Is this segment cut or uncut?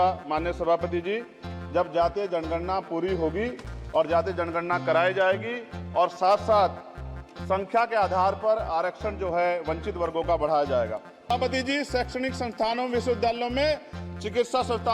cut